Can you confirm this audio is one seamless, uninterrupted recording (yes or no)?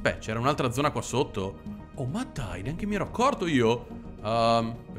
yes